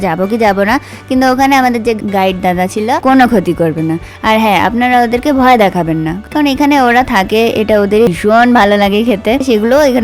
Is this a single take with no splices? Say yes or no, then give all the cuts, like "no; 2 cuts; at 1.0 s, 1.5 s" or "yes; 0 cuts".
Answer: no; 2 cuts; at 3.0 s, 8.1 s